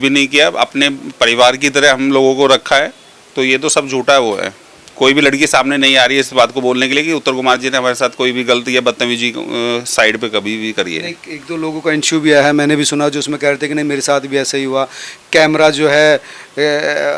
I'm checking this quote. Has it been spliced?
no; 0 cuts

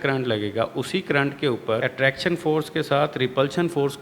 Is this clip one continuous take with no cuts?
no; 1 cut; at 1.8 s

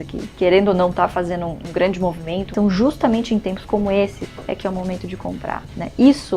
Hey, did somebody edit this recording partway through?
yes; 3 cuts; at 1.6 s, 2.5 s, 4.2 s

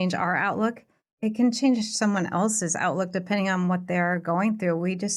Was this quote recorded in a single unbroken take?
yes; 0 cuts

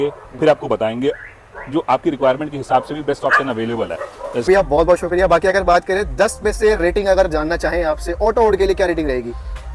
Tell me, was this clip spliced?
yes; 1 cut; at 4.5 s

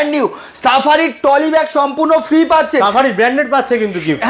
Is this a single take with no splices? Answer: yes; 0 cuts

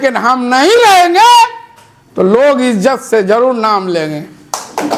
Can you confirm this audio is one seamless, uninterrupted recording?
yes; 0 cuts

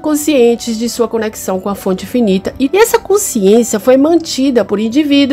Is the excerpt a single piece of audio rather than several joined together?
no; 1 cut; at 2.7 s

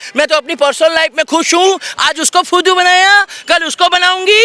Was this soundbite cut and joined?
no; 0 cuts

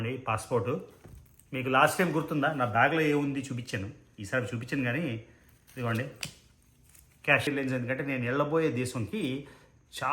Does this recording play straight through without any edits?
no; 1 cut; at 7.5 s

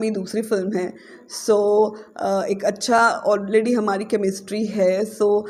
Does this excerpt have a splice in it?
no; 0 cuts

